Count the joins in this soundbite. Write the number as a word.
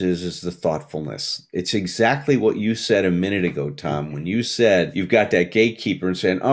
zero